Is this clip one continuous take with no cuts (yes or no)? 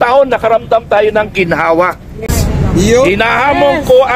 no